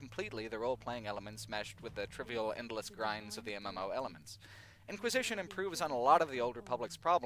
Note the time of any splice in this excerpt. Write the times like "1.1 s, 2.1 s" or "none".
6.3 s